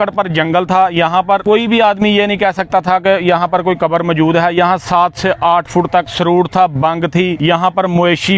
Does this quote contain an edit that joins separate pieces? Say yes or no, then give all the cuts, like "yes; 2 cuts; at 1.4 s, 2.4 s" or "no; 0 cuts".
yes; 3 cuts; at 1.4 s, 6.1 s, 7.4 s